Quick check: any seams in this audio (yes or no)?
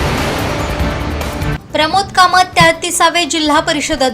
yes